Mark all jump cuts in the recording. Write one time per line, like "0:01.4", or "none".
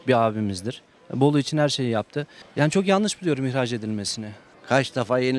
0:04.4